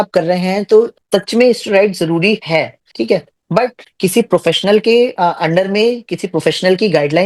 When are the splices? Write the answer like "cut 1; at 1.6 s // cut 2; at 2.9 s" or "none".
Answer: cut 1; at 1.0 s // cut 2; at 2.8 s // cut 3; at 3.8 s